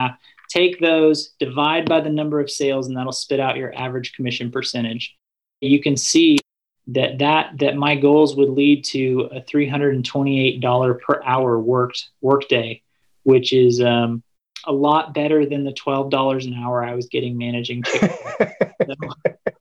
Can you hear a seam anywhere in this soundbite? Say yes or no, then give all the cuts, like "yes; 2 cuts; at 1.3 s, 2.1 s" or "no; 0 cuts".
yes; 1 cut; at 5.6 s